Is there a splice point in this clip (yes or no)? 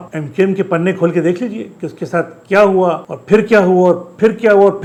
no